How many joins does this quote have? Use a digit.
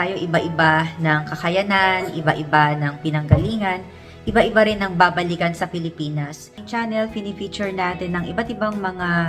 1